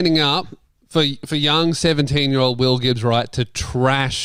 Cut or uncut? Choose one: uncut